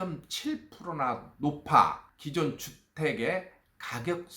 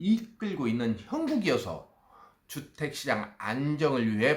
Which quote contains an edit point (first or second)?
first